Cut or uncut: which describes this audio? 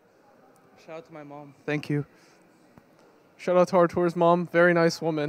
uncut